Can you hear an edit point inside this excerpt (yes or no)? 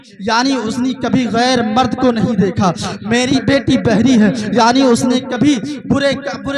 yes